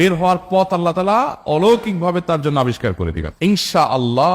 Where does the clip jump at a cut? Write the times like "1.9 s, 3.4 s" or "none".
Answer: 3.3 s